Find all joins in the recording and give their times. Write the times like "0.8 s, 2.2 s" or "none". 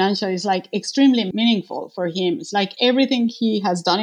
1.3 s

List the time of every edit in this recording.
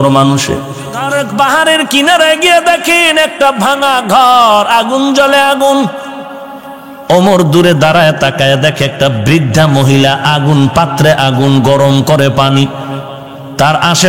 1.1 s

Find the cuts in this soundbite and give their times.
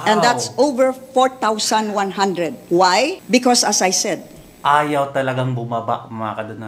2.6 s, 3.2 s

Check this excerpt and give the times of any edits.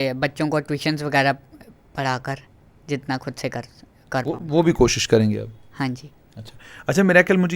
none

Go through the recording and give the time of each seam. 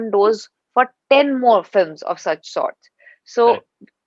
none

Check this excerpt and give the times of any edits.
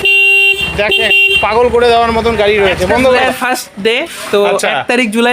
3.2 s

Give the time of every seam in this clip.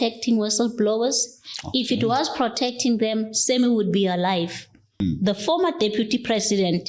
5.0 s

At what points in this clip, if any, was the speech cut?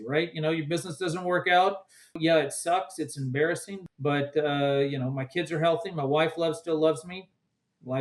2.2 s, 3.7 s

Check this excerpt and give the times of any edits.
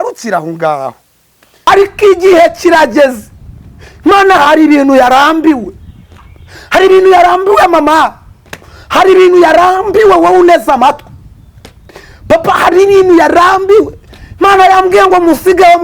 1.7 s

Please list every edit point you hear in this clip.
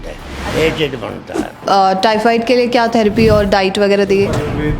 1.6 s

